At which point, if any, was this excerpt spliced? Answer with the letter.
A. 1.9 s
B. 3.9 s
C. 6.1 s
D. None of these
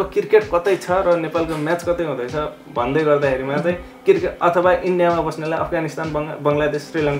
D